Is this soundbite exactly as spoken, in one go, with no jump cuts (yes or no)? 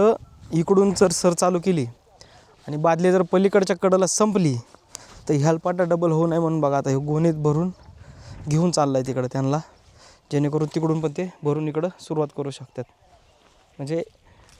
yes